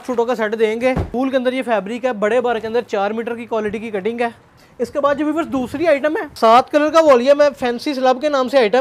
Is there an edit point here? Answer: yes; 3 cuts; at 1.1 s, 4.6 s, 6.3 s

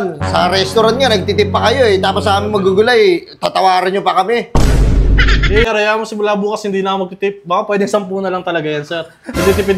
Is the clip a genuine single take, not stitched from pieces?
no; 1 cut; at 5.7 s

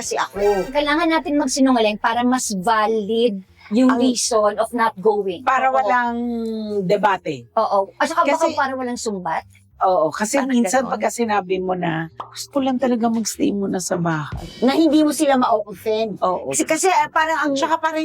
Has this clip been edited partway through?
no; 0 cuts

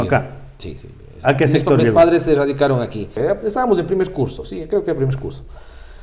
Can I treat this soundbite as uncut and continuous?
no; 1 cut; at 3.1 s

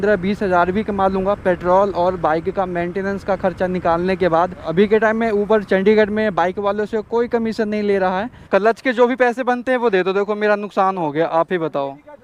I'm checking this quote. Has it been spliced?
yes; 2 cuts; at 4.7 s, 8.3 s

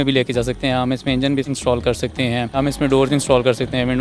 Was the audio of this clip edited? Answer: yes; 2 cuts; at 1.5 s, 2.6 s

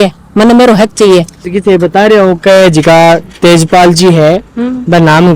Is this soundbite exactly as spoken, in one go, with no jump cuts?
yes; 0 cuts

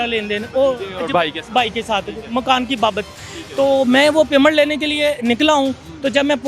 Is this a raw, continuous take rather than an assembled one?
yes; 0 cuts

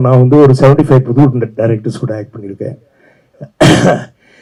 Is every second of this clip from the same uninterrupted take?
yes; 0 cuts

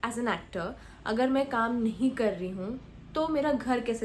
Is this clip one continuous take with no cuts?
yes; 0 cuts

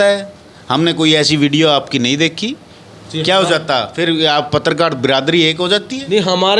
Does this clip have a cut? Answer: no; 0 cuts

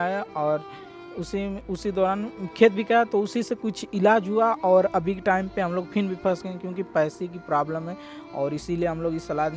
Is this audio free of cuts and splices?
yes; 0 cuts

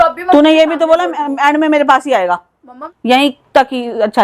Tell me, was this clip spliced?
yes; 1 cut; at 2.8 s

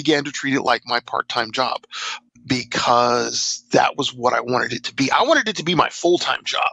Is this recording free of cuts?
no; 1 cut; at 2.2 s

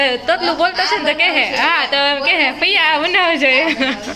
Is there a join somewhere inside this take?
no; 0 cuts

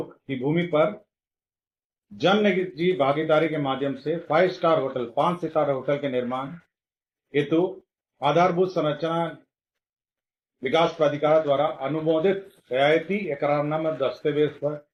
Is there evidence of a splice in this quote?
no; 0 cuts

